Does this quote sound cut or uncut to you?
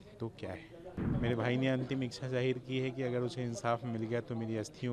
cut